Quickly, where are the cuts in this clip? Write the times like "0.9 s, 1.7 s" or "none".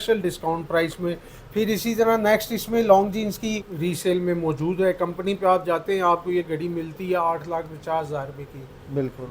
1.3 s, 3.7 s